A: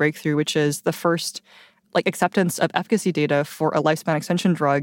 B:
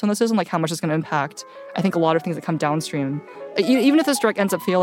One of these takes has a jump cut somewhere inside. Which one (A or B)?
B